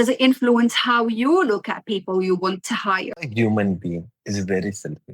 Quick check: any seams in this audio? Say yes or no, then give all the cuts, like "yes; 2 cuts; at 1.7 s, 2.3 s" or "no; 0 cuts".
yes; 1 cut; at 3.2 s